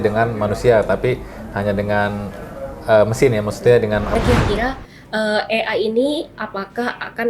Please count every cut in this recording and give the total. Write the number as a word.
one